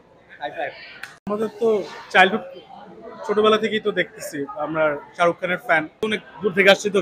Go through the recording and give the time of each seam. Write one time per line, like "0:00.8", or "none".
0:01.3
0:06.0